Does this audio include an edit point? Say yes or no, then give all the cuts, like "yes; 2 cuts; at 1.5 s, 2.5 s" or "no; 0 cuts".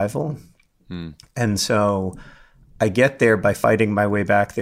yes; 1 cut; at 3.4 s